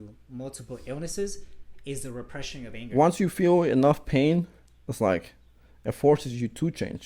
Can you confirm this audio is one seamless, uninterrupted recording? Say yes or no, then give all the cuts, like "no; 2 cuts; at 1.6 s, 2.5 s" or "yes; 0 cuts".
no; 1 cut; at 2.8 s